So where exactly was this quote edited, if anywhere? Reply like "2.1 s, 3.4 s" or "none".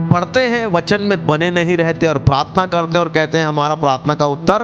none